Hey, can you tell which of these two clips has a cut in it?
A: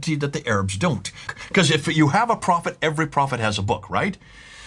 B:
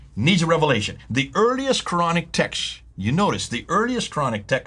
A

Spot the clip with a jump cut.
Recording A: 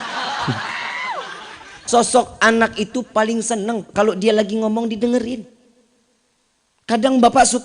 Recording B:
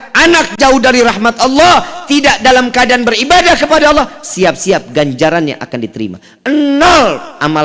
A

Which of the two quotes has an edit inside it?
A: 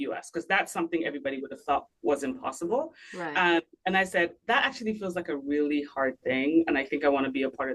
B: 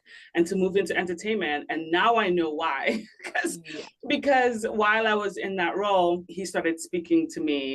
B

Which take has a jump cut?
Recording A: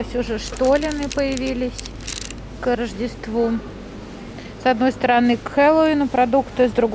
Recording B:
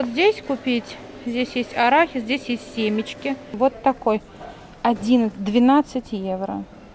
B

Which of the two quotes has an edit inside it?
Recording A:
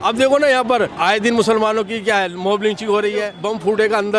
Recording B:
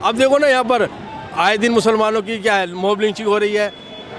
A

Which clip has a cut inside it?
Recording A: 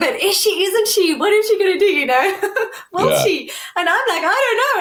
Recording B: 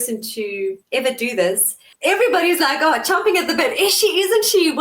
B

